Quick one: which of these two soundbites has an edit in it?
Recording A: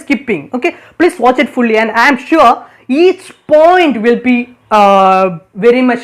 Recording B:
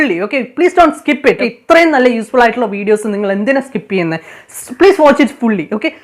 B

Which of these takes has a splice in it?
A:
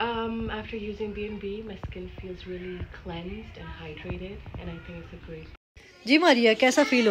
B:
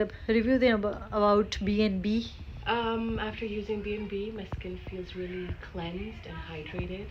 A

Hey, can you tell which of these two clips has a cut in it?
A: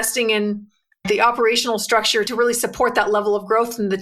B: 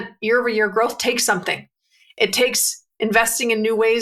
A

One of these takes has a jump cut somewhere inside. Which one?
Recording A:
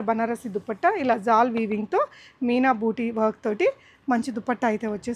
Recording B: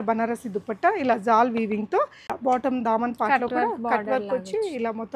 B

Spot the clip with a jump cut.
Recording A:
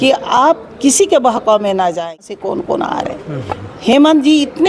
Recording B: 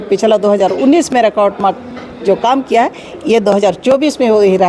A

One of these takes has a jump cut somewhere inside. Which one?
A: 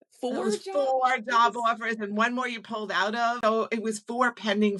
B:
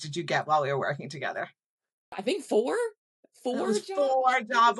A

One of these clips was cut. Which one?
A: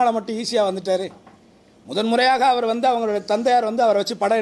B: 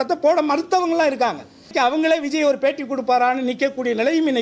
B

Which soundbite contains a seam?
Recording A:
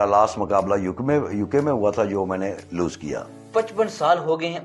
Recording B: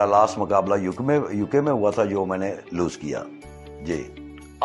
A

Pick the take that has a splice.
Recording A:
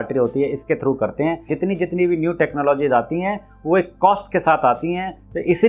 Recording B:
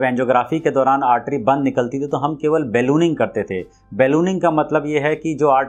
A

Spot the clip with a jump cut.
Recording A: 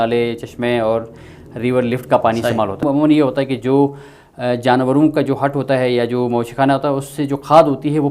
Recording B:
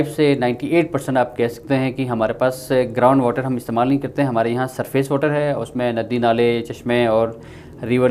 A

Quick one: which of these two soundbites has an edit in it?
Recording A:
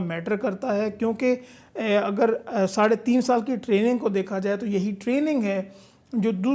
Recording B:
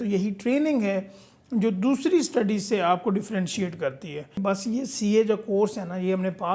B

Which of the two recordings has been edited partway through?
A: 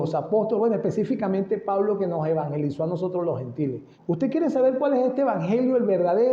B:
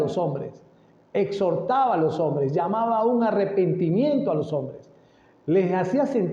A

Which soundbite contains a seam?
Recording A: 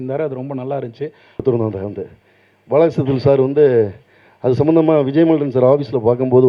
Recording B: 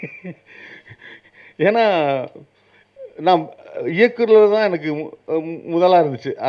A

